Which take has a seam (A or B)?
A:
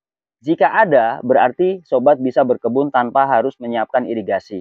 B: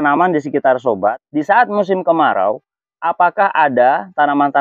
B